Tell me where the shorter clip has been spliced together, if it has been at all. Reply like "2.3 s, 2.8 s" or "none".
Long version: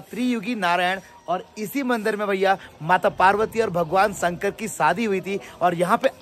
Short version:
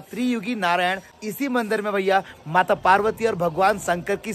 1.1 s